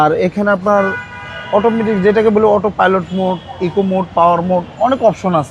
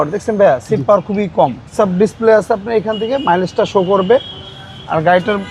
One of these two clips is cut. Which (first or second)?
second